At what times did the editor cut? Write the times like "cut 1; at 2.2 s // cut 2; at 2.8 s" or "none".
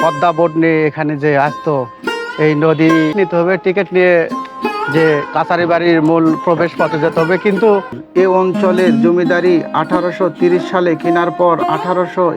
cut 1; at 3.1 s // cut 2; at 8.0 s